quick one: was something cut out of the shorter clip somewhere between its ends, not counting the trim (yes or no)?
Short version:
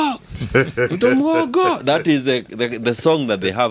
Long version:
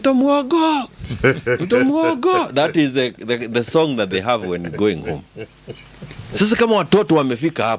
no